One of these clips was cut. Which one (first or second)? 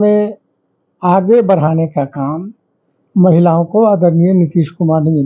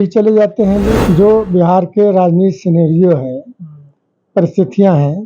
second